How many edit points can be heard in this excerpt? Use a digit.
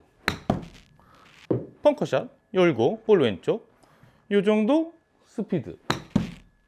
0